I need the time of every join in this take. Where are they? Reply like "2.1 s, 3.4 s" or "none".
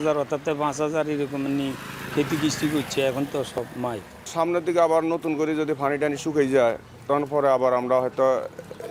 none